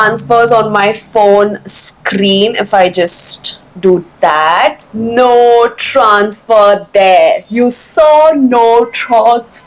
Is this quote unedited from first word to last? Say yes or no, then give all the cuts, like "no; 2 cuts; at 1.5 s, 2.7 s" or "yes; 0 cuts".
yes; 0 cuts